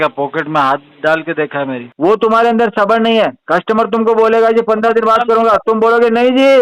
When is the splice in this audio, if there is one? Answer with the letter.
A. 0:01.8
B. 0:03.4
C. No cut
A